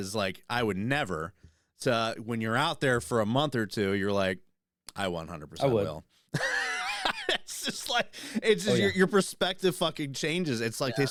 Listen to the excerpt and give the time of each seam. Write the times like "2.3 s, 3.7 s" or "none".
none